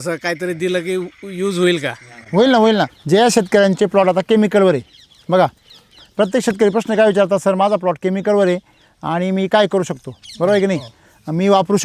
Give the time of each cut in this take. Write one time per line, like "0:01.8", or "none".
none